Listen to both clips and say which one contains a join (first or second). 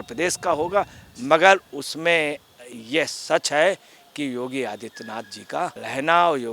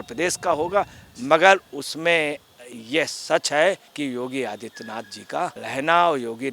second